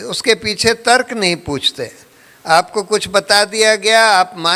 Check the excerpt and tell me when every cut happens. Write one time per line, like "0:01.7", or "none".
none